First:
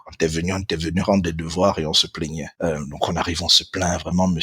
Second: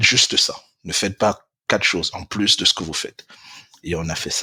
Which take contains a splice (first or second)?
first